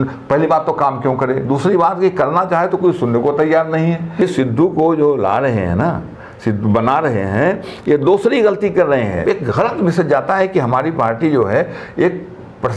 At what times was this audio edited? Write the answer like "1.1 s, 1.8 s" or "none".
4.2 s, 9.2 s